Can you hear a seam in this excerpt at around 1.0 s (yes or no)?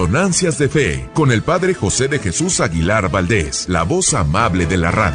yes